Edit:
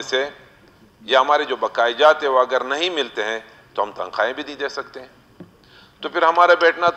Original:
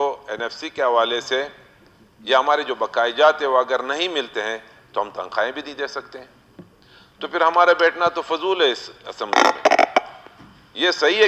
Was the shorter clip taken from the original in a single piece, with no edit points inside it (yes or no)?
yes